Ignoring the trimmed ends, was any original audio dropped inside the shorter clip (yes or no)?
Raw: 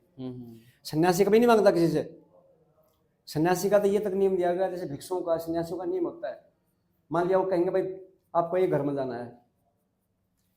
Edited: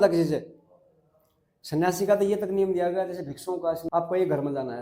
yes